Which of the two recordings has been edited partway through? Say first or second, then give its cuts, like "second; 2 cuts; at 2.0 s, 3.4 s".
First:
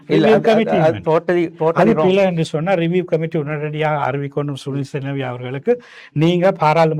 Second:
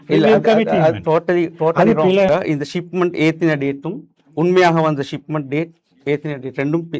second; 1 cut; at 2.3 s